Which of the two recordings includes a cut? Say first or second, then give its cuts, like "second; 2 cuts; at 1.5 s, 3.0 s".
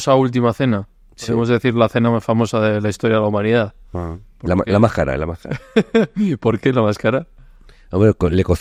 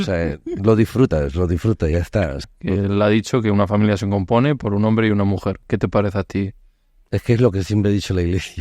second; 1 cut; at 2.5 s